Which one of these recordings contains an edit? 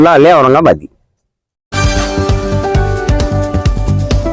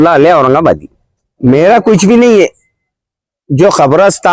second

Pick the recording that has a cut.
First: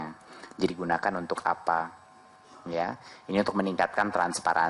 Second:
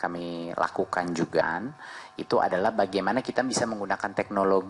second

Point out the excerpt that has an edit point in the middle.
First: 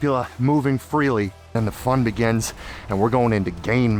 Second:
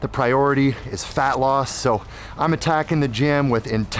first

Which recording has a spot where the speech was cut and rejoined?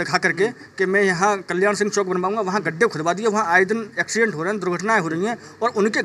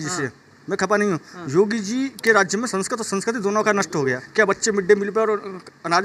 second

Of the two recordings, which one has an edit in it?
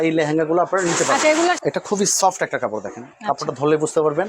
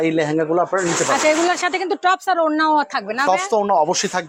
first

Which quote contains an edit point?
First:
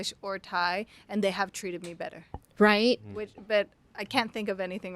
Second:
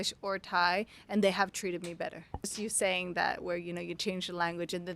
second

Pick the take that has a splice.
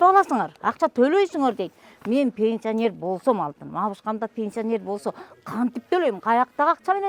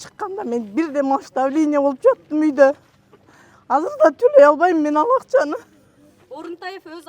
second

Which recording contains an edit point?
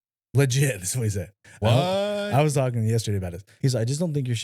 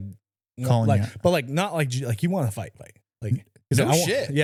first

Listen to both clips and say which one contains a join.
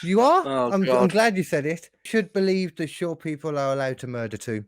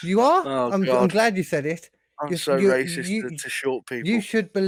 first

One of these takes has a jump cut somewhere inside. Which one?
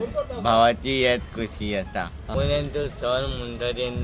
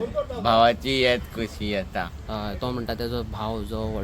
first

